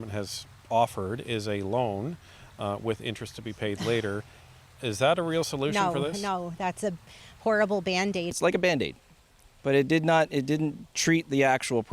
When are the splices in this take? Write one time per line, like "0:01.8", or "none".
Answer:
0:08.3